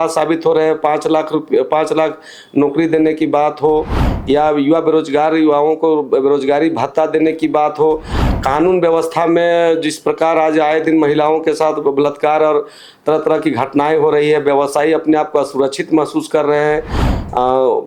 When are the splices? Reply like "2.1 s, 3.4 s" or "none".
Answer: none